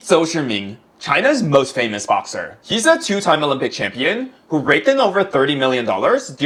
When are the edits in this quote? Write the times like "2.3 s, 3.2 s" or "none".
none